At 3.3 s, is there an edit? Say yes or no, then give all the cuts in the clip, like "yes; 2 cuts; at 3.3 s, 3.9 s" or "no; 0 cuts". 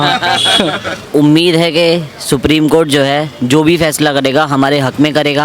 no; 1 cut; at 1.0 s